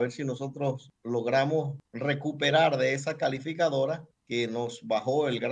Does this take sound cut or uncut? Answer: cut